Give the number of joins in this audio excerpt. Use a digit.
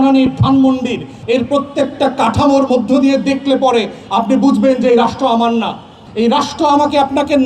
2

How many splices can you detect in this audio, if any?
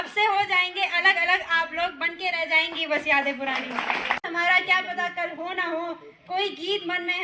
1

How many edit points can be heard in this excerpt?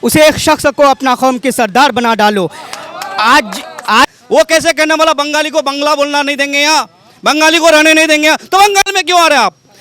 1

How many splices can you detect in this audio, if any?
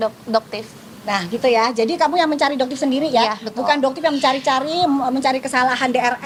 0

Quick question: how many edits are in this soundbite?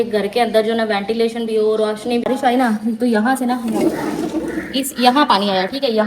1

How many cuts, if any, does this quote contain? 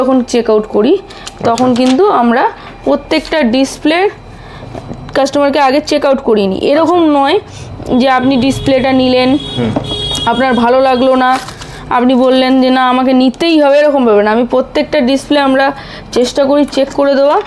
0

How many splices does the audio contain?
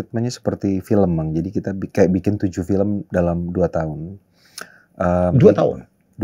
0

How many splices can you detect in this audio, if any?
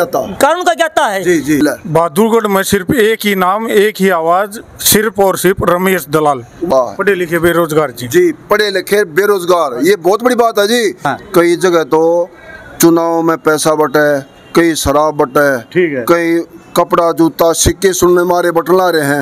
3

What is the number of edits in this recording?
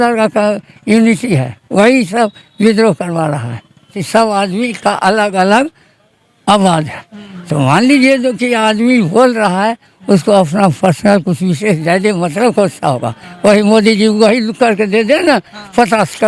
1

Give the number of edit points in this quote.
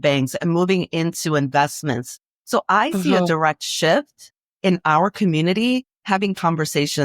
1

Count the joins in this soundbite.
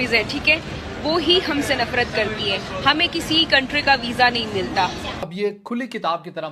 1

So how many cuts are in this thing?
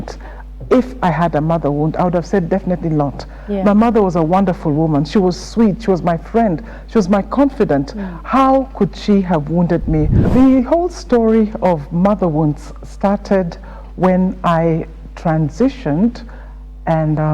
1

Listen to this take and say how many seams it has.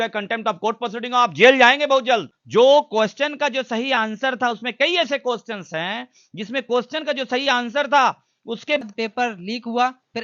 2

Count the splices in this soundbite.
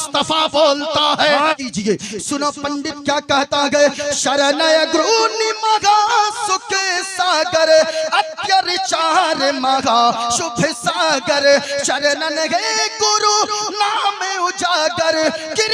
1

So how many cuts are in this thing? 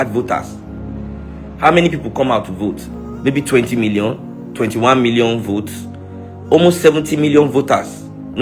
1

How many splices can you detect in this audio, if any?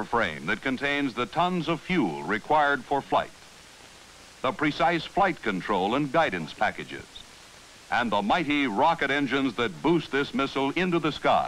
1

